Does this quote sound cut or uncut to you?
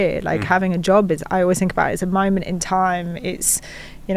uncut